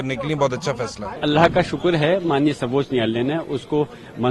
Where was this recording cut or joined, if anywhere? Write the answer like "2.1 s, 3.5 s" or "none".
1.1 s